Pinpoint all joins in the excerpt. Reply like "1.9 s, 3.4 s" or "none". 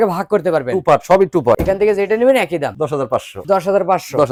none